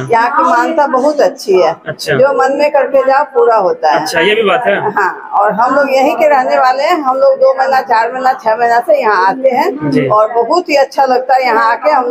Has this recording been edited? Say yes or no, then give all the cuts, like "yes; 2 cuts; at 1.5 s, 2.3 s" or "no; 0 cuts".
no; 0 cuts